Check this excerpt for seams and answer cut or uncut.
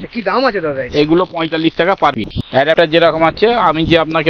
cut